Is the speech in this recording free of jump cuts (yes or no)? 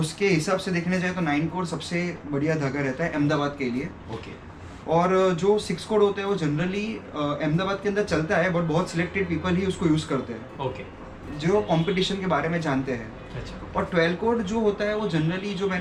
yes